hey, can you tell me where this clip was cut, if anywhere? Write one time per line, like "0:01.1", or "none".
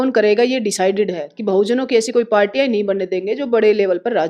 none